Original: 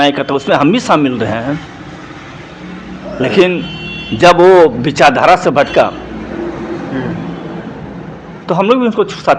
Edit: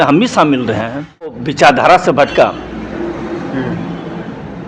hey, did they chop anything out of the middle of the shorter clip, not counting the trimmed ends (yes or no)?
yes